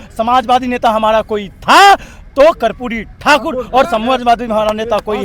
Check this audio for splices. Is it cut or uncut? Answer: uncut